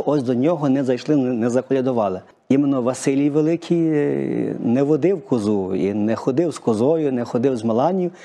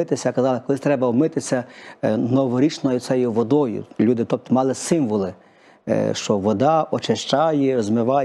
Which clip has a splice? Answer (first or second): first